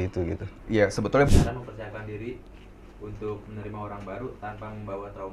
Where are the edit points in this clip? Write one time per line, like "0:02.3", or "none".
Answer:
0:01.3